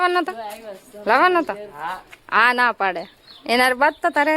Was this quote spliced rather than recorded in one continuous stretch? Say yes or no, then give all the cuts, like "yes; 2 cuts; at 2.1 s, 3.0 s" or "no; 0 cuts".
no; 0 cuts